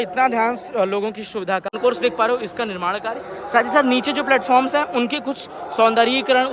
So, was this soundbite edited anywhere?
yes; 1 cut; at 1.8 s

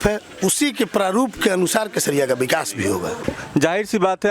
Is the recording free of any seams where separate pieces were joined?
no; 1 cut; at 3.3 s

